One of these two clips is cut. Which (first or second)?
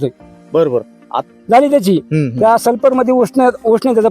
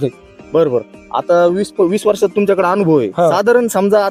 first